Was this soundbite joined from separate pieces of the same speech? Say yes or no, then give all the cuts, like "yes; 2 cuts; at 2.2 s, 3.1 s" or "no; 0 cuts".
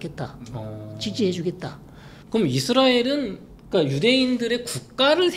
yes; 1 cut; at 1.7 s